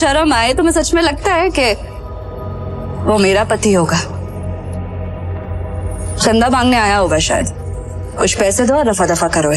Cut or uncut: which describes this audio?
uncut